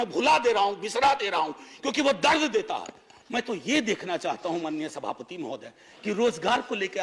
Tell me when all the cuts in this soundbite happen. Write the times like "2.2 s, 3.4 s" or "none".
none